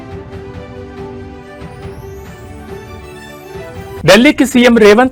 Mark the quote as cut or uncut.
uncut